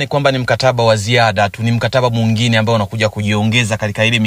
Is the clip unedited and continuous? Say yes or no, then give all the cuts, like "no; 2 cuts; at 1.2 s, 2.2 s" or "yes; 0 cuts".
yes; 0 cuts